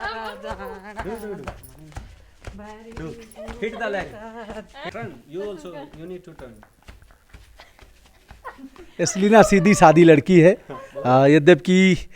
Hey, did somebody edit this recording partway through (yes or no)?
yes